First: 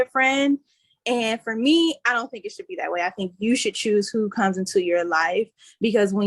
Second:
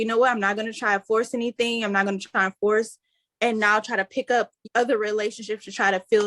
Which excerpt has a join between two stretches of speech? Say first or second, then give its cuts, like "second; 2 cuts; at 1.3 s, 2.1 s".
second; 1 cut; at 4.6 s